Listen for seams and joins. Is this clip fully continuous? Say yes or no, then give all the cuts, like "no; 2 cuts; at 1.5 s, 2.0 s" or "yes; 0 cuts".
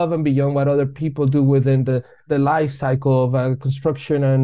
no; 1 cut; at 2.1 s